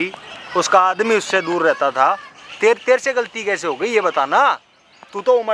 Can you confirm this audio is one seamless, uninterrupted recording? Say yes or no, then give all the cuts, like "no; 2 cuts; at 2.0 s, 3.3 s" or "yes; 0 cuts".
yes; 0 cuts